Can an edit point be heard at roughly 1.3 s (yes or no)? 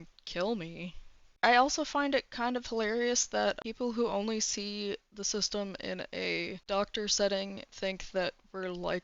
yes